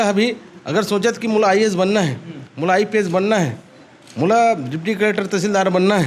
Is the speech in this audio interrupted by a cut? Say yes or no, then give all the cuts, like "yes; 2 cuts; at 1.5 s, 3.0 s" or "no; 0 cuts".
no; 0 cuts